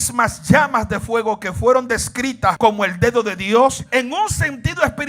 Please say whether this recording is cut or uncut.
cut